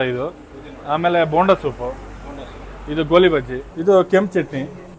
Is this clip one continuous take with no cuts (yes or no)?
no